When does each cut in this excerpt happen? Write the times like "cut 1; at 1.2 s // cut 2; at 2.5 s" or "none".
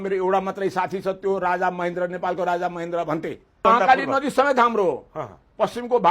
cut 1; at 3.6 s